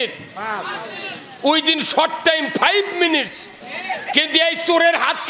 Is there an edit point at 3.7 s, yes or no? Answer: yes